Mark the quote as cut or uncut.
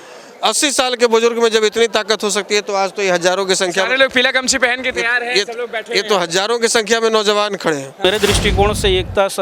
cut